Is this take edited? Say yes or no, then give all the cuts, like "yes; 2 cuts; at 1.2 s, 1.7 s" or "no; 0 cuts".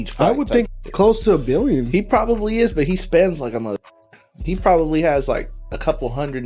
no; 0 cuts